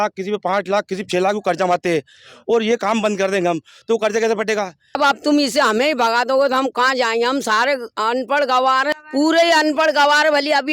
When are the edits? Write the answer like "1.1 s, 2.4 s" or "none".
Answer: 4.9 s, 8.9 s